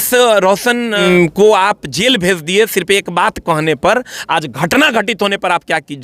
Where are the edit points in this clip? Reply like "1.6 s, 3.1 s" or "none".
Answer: 1.0 s